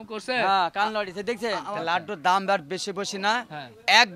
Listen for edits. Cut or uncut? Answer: cut